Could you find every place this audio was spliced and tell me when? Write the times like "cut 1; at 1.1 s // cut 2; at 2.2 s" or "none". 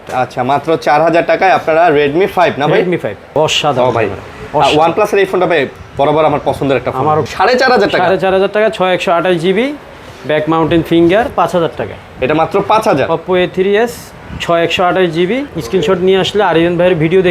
cut 1; at 3.4 s // cut 2; at 7.2 s // cut 3; at 11.3 s // cut 4; at 15.5 s